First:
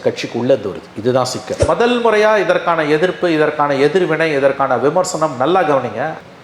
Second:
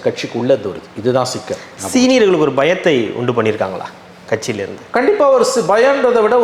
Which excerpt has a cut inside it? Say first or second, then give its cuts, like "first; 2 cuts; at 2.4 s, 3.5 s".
first; 1 cut; at 1.6 s